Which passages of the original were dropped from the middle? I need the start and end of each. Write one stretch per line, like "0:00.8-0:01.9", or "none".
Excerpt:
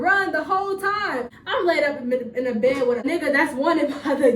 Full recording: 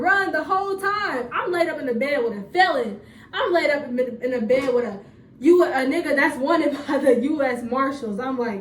0:01.3-0:03.2
0:04.9-0:05.9